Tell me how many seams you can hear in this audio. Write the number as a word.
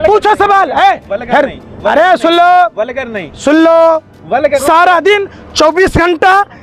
one